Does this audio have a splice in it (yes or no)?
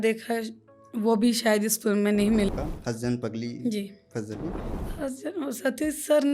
yes